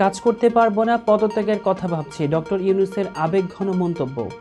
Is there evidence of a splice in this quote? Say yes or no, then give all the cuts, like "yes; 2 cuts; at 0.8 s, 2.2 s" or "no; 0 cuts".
no; 0 cuts